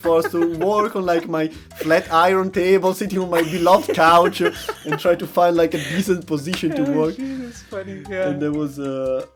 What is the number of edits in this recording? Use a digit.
0